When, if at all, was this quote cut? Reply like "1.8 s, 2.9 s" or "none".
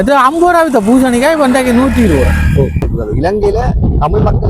2.9 s